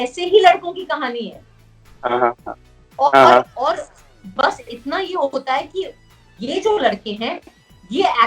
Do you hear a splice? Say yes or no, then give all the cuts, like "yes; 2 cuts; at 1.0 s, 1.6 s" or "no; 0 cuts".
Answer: no; 0 cuts